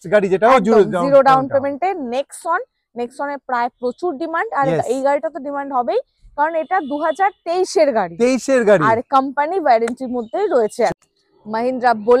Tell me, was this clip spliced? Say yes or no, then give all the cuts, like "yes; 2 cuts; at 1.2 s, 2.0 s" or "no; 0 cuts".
yes; 1 cut; at 10.9 s